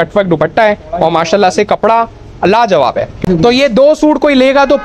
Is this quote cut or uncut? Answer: cut